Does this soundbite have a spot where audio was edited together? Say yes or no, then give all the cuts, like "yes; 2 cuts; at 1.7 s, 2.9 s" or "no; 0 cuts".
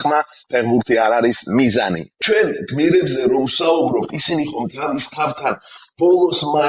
yes; 1 cut; at 2.0 s